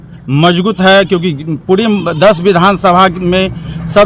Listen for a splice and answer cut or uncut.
uncut